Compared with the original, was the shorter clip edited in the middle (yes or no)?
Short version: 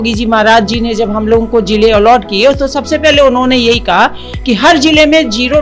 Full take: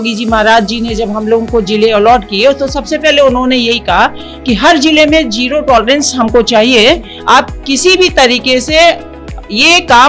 no